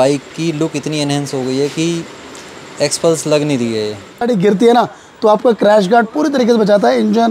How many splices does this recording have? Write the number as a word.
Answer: one